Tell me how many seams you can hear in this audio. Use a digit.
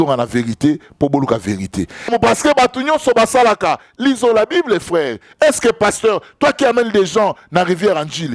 1